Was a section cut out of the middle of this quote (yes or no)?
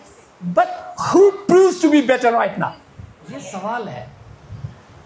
yes